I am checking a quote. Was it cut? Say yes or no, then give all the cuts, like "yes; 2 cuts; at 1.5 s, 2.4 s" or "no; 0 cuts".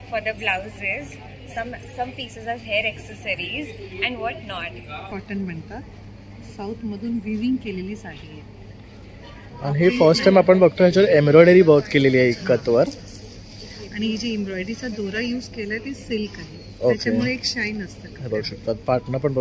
yes; 1 cut; at 5.0 s